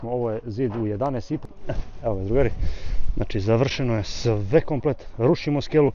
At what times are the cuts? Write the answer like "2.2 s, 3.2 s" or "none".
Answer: 1.4 s